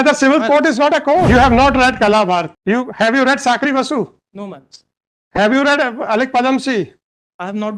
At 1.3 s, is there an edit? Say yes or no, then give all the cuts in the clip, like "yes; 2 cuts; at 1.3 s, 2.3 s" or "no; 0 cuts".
yes; 2 cuts; at 1.3 s, 2.5 s